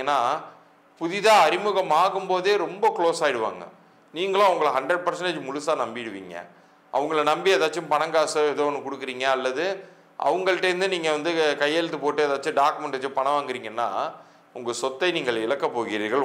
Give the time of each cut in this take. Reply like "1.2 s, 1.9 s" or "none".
none